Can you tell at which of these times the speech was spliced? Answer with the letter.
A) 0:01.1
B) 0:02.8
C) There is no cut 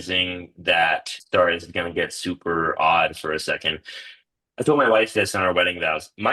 A